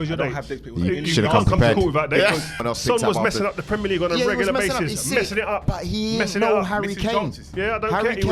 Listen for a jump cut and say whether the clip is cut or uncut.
cut